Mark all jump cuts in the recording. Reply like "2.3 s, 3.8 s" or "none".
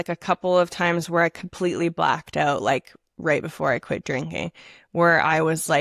none